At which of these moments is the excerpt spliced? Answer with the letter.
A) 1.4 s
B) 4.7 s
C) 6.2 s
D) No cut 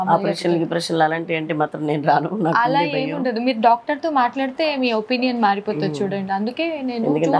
D